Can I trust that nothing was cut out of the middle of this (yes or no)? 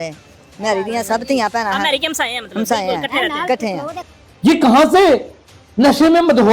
no